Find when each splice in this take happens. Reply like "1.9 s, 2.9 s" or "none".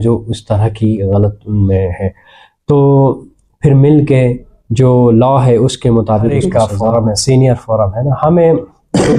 6.4 s